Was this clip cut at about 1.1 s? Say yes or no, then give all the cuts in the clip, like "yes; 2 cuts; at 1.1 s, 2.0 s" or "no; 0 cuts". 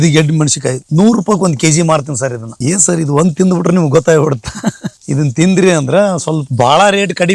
no; 2 cuts; at 2.5 s, 6.5 s